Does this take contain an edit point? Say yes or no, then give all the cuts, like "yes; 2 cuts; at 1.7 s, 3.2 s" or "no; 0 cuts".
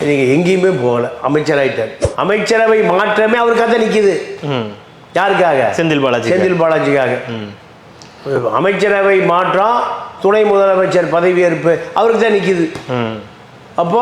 yes; 1 cut; at 2.0 s